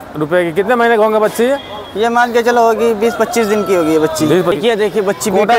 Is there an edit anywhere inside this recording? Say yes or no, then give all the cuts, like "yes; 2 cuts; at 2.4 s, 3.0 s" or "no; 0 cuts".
yes; 1 cut; at 4.6 s